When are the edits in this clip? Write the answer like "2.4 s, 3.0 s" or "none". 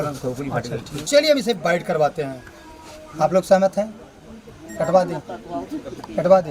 1.1 s